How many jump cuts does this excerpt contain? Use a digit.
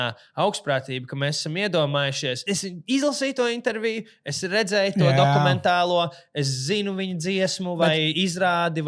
1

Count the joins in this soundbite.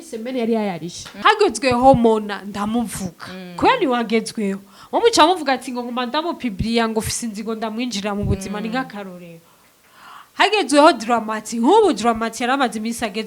1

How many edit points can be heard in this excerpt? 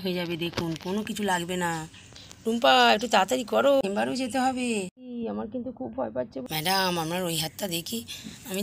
3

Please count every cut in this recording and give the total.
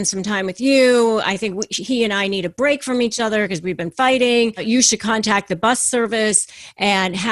1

